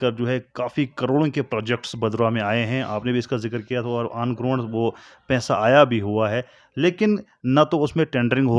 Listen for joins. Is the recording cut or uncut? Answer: uncut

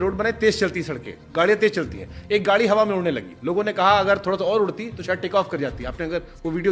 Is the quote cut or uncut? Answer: uncut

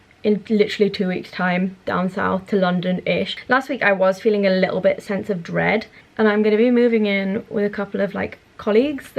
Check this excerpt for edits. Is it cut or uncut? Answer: cut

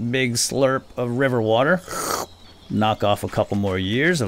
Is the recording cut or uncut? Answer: uncut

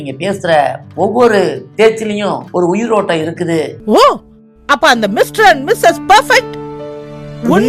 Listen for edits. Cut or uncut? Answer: cut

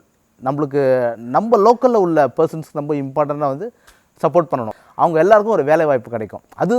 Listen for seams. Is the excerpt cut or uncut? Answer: cut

